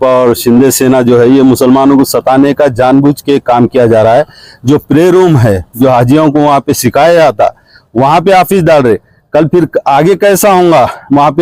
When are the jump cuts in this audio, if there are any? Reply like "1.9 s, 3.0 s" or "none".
none